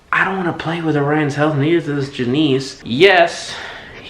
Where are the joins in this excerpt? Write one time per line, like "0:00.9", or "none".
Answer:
0:02.8